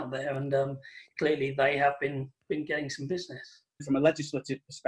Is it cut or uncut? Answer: cut